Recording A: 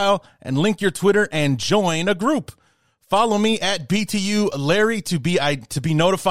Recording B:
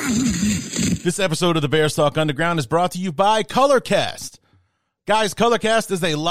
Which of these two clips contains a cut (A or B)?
B